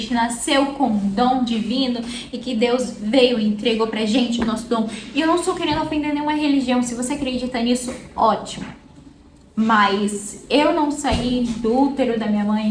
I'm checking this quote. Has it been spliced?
no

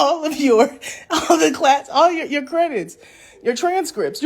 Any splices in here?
no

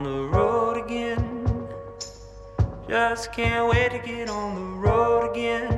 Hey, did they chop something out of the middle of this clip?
no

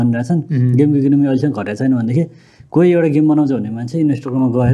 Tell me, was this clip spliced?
no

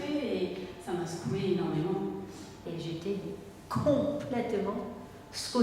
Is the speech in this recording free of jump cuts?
no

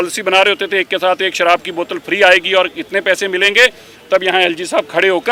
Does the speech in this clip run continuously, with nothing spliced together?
yes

